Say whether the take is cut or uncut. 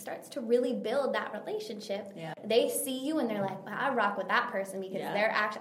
cut